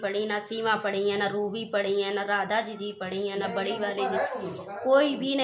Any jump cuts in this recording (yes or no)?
no